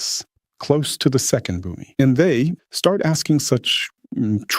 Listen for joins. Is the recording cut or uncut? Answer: cut